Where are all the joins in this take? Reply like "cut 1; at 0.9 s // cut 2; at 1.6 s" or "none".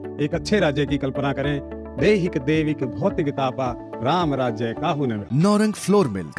none